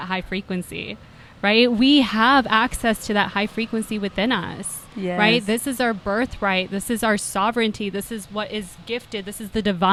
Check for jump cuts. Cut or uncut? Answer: uncut